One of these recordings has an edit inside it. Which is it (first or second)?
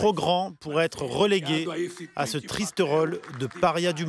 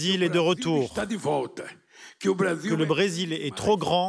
second